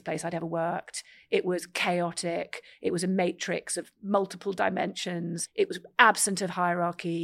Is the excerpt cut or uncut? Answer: cut